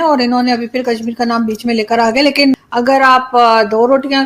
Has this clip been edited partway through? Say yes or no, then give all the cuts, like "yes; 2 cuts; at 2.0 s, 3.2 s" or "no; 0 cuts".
yes; 1 cut; at 2.6 s